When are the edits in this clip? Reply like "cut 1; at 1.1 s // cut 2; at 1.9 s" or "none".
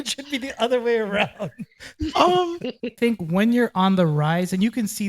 cut 1; at 3.0 s